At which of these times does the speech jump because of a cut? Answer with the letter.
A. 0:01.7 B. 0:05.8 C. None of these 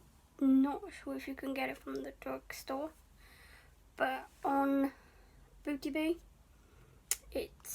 C